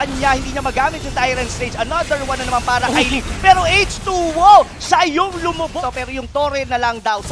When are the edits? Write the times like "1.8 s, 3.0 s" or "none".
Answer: 5.7 s